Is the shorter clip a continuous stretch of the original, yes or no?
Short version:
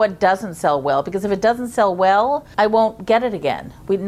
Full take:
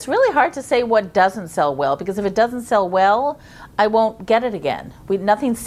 no